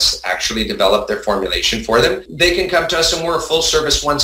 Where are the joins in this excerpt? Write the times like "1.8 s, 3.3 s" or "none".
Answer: 2.3 s